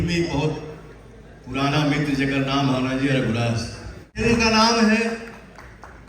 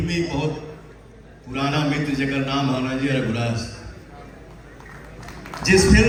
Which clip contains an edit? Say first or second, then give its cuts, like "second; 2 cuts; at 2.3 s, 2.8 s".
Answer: first; 1 cut; at 4.2 s